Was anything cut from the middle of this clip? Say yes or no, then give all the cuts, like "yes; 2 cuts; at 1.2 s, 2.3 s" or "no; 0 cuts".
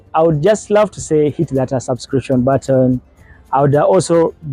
no; 0 cuts